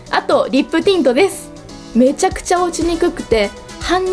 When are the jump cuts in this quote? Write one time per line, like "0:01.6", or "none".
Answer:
0:01.8

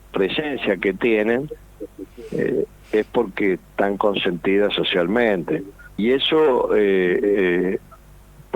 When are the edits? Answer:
0:05.8

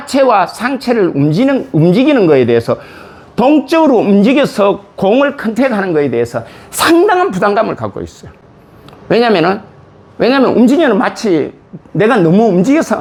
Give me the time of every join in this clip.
none

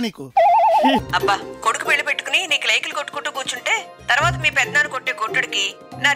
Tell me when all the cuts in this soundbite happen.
0:01.0

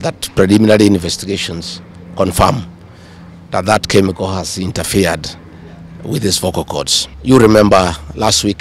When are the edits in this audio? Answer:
0:07.0

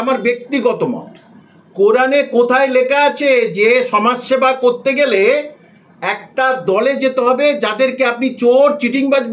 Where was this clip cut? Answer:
0:01.3

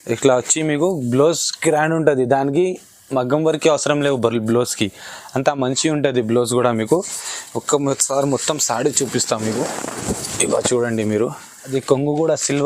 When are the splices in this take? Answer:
0:11.5

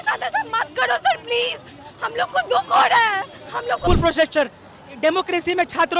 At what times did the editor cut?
0:03.8

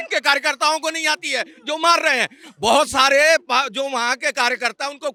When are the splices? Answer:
none

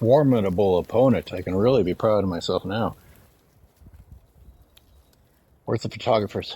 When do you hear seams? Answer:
0:03.2

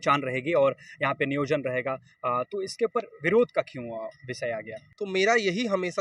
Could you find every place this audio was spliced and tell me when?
0:04.8

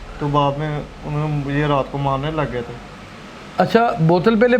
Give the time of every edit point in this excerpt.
none

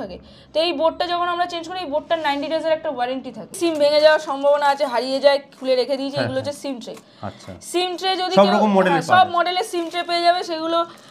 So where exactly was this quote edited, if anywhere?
0:03.6

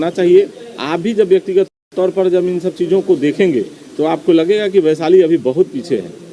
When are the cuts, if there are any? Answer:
none

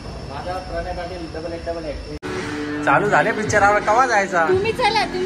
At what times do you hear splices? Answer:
0:02.2

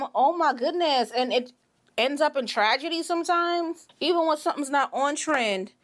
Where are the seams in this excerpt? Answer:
0:03.9

